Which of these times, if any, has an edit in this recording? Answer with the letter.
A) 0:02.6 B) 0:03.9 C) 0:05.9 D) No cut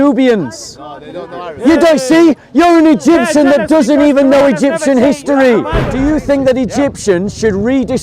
C